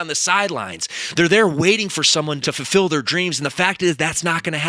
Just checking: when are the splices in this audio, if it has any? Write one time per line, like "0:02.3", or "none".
0:02.3